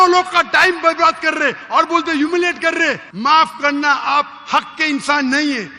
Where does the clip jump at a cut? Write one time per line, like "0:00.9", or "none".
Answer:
0:03.1